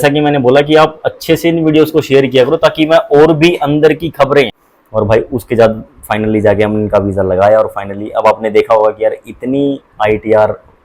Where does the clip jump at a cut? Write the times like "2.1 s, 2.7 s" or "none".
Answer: 4.6 s